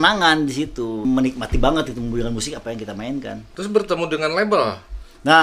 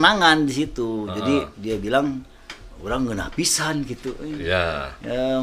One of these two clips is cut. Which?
first; 2 cuts; at 1.0 s, 3.5 s

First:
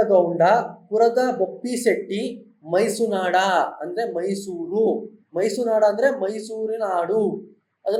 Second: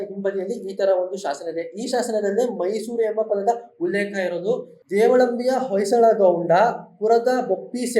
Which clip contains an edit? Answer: second; 1 cut; at 4.7 s

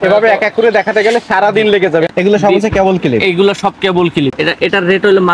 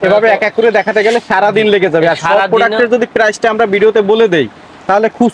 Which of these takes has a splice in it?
first; 2 cuts; at 2.1 s, 4.3 s

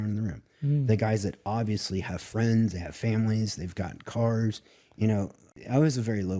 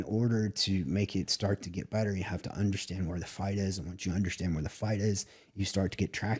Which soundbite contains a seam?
first; 1 cut; at 5.5 s

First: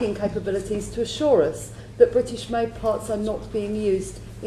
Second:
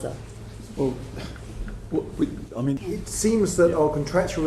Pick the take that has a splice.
second; 1 cut; at 2.5 s

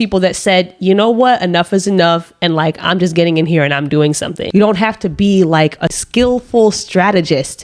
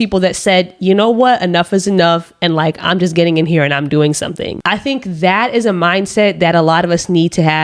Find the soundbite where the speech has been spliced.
first; 1 cut; at 4.5 s

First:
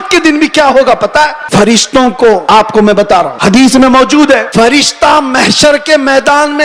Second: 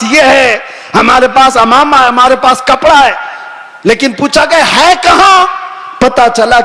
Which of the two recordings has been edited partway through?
first; 4 cuts; at 1.4 s, 2.4 s, 3.3 s, 4.5 s

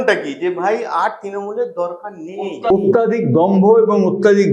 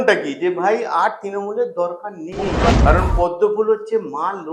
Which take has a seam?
second; 1 cut; at 2.7 s

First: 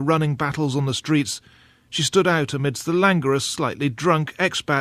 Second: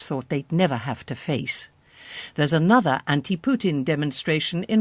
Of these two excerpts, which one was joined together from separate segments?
first; 1 cut; at 1.2 s

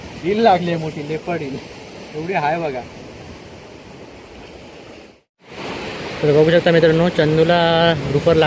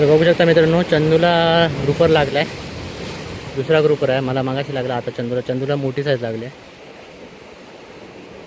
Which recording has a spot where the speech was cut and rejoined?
first; 1 cut; at 5.3 s

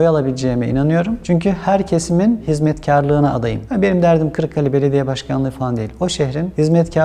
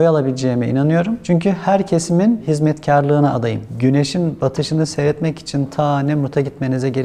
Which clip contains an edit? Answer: second; 1 cut; at 3.6 s

